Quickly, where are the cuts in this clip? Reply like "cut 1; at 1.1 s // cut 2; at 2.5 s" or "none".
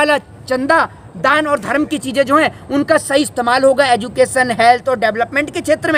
none